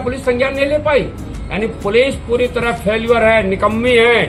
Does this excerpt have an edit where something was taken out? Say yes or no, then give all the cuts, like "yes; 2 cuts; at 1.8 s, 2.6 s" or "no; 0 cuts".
no; 0 cuts